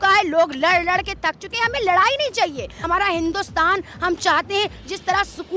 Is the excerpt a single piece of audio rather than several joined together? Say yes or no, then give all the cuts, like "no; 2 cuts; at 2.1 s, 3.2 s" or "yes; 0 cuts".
no; 1 cut; at 2.7 s